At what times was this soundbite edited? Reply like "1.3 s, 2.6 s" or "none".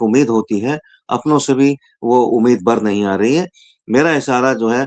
none